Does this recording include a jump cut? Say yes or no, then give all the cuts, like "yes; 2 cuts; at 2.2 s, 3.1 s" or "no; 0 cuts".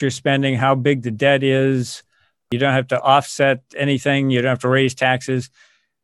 yes; 1 cut; at 2.5 s